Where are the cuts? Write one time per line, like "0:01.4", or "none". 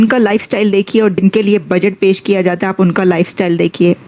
none